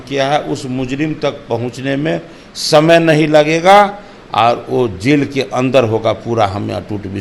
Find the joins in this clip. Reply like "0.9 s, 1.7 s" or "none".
none